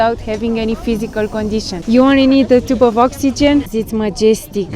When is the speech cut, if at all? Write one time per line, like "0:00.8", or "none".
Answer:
0:01.7
0:03.7